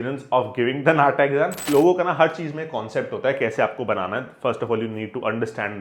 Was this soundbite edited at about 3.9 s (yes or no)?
no